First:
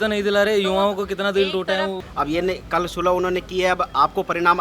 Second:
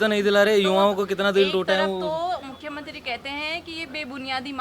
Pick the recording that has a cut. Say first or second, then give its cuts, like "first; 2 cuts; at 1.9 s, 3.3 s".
first; 1 cut; at 2.0 s